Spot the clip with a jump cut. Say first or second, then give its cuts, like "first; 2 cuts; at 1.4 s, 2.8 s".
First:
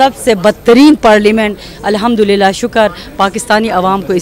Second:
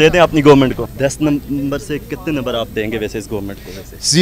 second; 1 cut; at 0.9 s